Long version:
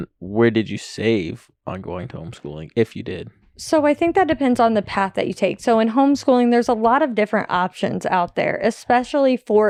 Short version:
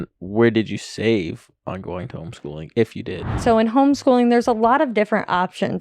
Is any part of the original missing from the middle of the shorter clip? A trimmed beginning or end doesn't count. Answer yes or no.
yes